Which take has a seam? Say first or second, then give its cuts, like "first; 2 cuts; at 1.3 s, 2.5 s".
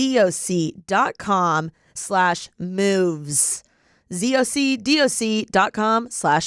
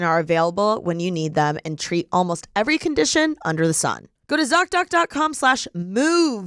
second; 1 cut; at 4.1 s